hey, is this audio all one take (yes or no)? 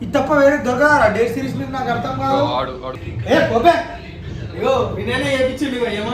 no